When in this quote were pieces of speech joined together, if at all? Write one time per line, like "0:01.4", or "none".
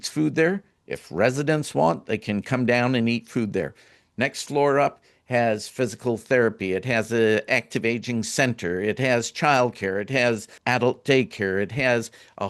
0:07.5
0:10.5